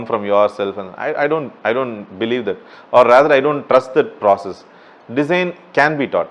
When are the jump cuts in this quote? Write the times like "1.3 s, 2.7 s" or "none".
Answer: none